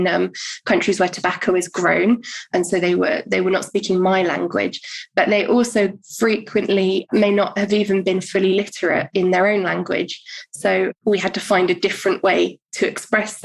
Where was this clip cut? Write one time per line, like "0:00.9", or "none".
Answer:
0:07.1
0:10.9